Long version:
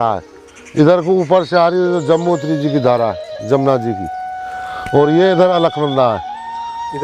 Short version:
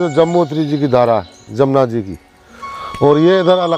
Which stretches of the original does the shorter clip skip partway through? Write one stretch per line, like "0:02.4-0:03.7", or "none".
none